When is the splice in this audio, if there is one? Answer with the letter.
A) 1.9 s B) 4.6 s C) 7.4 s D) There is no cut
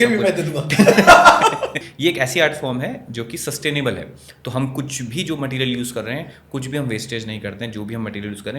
A